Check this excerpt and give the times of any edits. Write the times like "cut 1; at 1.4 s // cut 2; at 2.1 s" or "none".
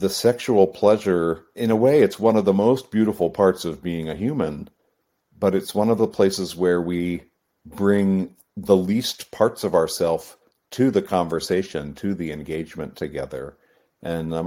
cut 1; at 1.5 s